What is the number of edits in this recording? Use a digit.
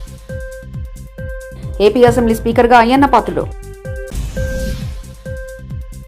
1